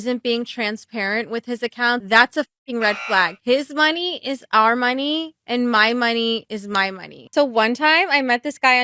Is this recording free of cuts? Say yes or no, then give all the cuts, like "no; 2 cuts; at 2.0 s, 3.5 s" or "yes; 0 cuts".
no; 1 cut; at 7.2 s